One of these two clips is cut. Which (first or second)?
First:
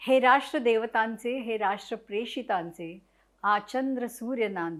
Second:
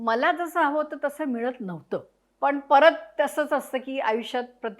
second